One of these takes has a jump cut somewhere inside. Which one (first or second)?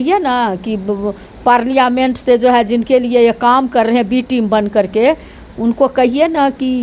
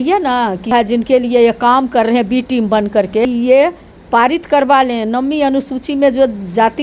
second